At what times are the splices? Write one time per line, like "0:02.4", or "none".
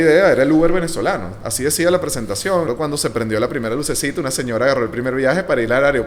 0:02.7